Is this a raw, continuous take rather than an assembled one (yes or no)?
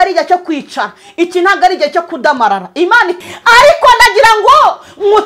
no